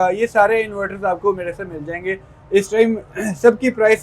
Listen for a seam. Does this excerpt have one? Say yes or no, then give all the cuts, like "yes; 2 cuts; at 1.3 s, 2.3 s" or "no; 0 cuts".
no; 0 cuts